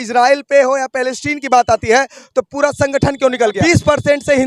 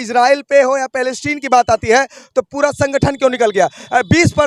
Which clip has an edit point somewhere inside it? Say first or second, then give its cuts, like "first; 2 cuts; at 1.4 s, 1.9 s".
first; 1 cut; at 3.6 s